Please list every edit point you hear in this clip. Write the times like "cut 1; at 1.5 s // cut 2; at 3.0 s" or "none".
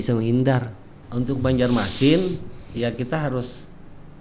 cut 1; at 1.0 s